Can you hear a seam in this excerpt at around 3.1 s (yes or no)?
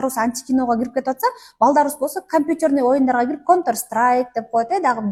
no